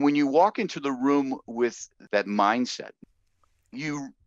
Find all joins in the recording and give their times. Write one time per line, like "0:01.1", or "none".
0:01.9
0:02.9

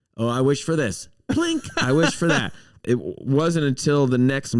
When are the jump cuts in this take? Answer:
0:02.6

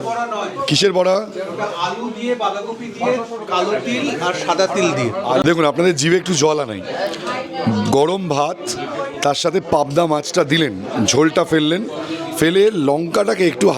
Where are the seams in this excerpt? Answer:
none

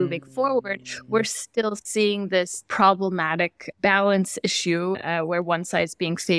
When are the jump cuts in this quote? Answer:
0:02.6
0:03.6
0:05.0

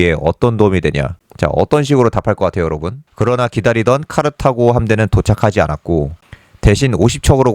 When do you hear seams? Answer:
0:03.0

